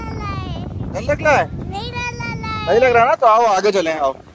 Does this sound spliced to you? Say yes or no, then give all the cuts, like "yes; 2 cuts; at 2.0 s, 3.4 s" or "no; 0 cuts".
no; 0 cuts